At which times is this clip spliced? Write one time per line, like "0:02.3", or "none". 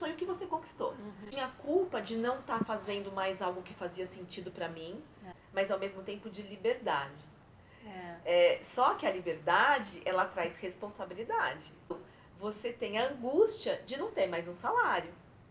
0:01.5
0:05.3
0:11.9